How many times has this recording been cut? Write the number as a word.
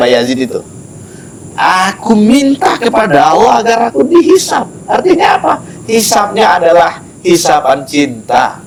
zero